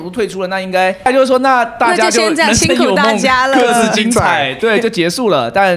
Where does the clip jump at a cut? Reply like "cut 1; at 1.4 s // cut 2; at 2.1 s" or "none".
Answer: cut 1; at 1.1 s // cut 2; at 4.5 s